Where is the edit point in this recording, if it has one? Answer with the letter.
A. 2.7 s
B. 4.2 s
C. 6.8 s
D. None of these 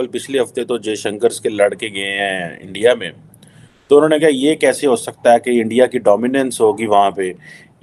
D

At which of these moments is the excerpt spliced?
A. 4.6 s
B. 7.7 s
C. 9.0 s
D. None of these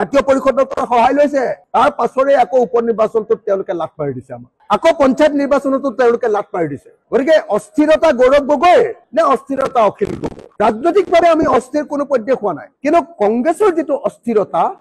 D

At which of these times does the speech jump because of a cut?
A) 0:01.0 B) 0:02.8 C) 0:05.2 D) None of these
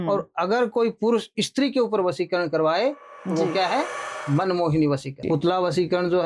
C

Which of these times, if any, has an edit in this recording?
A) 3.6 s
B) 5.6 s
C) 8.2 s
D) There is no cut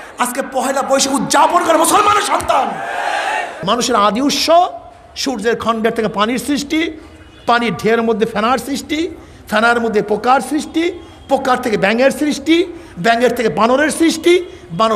A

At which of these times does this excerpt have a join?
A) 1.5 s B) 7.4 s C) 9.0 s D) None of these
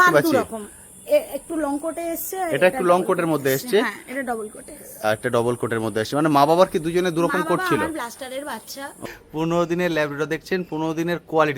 C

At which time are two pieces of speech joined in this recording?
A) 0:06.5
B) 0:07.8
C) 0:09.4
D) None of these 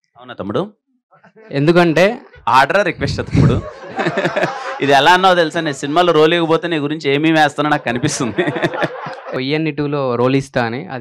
C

